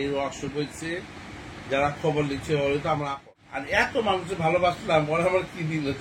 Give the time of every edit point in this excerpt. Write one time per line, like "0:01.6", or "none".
0:03.6